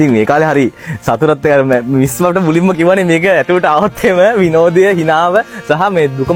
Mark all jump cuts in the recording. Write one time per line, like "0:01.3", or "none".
none